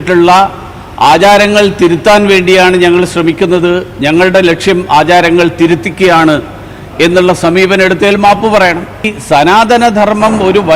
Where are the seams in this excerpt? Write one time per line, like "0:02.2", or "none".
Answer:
0:09.1